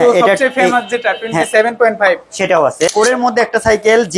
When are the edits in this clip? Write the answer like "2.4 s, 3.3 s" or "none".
2.9 s